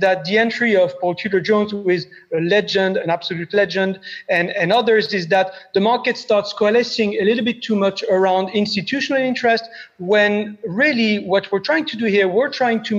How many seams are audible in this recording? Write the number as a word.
zero